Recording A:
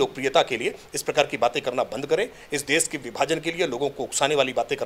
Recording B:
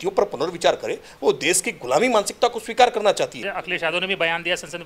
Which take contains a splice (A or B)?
B